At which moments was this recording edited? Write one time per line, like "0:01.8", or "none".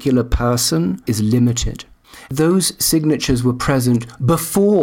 0:01.0
0:02.3